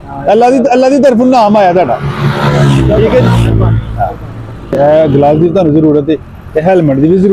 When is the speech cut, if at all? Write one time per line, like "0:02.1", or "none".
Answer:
0:04.8